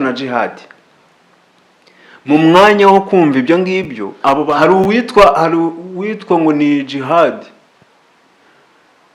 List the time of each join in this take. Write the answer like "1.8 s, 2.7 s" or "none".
4.5 s